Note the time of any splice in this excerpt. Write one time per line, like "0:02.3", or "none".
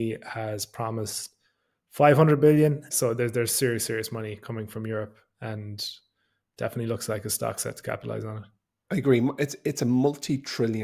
0:02.9